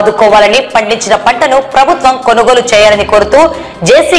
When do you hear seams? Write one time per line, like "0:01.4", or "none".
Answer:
none